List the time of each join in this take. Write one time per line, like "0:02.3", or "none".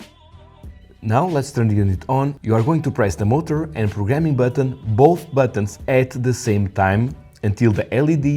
0:01.0